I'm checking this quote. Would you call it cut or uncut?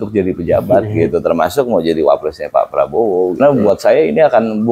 cut